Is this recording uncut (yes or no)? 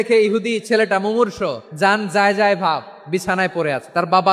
no